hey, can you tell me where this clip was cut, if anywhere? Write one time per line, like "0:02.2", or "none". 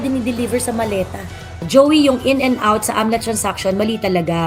0:01.6